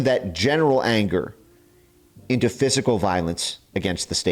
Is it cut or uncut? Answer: uncut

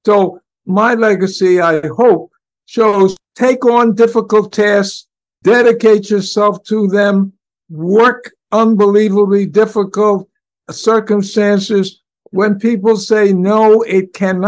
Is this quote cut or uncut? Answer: uncut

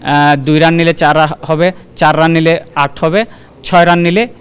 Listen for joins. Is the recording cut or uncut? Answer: uncut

